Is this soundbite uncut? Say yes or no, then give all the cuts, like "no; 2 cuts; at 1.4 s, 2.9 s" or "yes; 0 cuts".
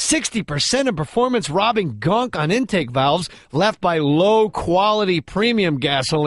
yes; 0 cuts